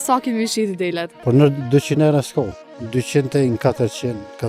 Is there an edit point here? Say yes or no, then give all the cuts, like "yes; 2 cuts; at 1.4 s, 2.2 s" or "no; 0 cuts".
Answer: yes; 1 cut; at 1.1 s